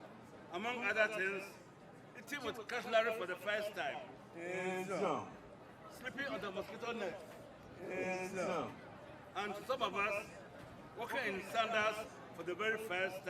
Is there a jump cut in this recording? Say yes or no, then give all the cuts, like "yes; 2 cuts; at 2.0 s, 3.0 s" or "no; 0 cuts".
no; 0 cuts